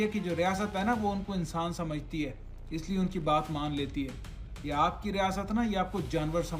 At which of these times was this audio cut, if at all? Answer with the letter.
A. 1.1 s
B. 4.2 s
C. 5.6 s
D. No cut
D